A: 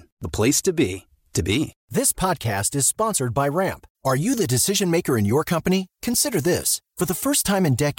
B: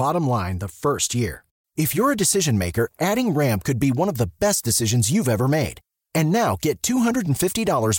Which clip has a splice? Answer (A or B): A